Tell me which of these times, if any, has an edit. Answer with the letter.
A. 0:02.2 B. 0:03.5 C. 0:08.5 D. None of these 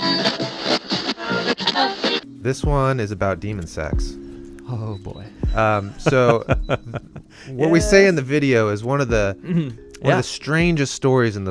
A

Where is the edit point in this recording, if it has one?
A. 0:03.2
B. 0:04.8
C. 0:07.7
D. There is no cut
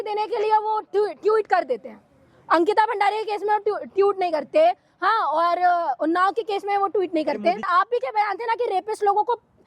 C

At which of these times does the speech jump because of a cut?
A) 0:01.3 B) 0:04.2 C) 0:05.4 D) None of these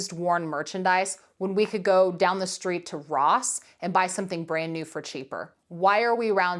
C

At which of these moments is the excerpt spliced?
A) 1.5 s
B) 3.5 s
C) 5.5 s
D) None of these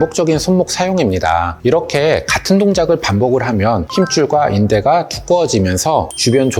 A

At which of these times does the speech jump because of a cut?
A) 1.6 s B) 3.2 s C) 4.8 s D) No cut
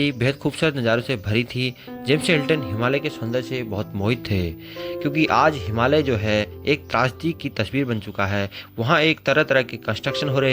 C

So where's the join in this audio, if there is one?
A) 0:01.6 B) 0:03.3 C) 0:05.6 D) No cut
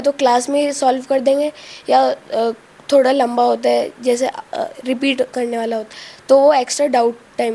D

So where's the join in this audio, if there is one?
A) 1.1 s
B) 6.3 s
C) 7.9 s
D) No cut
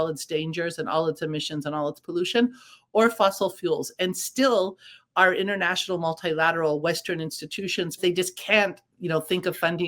C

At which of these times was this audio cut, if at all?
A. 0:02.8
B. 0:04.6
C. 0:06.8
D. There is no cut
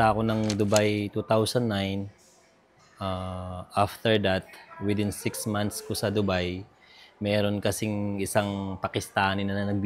D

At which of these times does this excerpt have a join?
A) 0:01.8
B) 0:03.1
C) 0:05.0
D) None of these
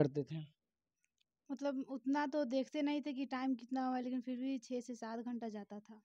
D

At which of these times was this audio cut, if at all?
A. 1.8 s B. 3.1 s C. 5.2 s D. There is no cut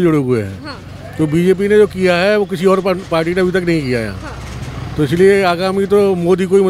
D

